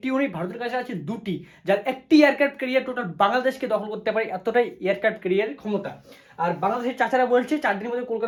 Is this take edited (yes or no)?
no